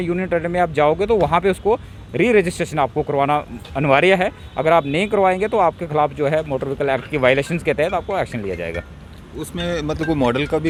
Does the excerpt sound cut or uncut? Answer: uncut